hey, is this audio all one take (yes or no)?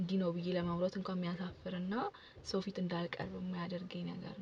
yes